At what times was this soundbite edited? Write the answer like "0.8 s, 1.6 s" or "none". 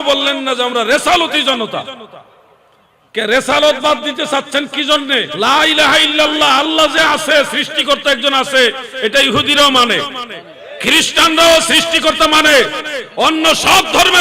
5.3 s